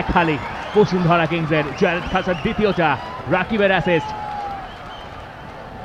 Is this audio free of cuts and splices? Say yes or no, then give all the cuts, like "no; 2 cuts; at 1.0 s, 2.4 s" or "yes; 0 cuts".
yes; 0 cuts